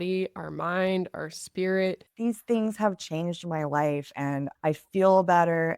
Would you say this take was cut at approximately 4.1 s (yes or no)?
no